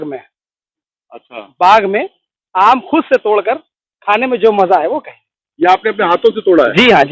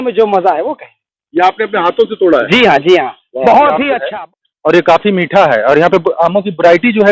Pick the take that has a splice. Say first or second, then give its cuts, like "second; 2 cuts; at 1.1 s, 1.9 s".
second; 1 cut; at 4.0 s